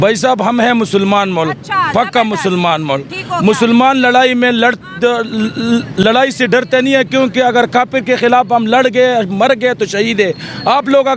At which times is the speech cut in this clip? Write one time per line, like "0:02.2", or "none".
none